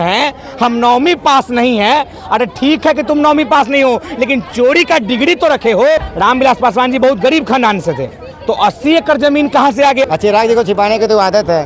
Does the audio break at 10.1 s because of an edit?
yes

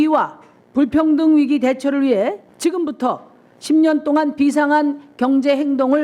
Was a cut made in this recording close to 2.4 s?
yes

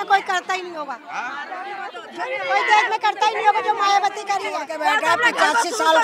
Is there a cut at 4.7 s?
yes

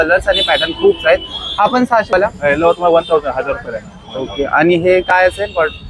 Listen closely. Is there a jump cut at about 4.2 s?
no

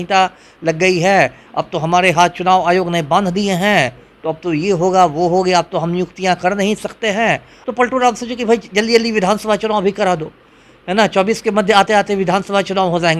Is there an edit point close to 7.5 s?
yes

